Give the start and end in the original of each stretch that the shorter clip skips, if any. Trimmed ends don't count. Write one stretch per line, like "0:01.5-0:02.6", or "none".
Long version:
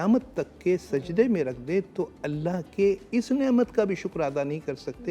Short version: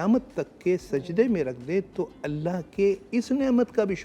none